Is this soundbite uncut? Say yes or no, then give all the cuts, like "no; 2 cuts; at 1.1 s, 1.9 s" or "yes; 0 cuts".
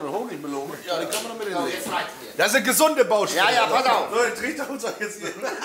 yes; 0 cuts